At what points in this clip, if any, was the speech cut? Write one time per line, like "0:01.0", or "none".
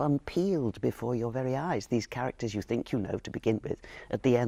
none